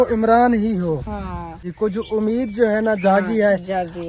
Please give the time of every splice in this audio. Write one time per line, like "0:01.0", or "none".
0:01.6